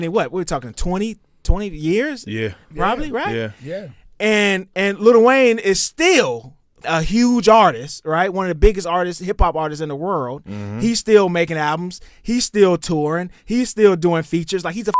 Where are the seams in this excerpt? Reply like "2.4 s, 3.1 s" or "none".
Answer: 6.7 s